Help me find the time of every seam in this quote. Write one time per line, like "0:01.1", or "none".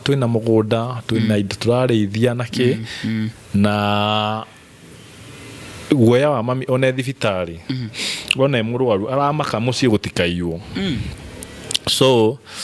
none